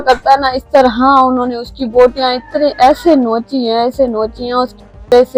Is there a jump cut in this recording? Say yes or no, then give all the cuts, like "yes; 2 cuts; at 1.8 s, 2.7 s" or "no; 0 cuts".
no; 0 cuts